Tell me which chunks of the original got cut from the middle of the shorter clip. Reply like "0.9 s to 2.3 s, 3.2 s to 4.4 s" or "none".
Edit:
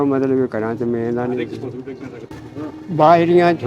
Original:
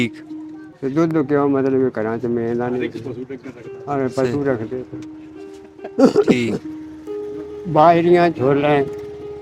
3.7 s to 7.1 s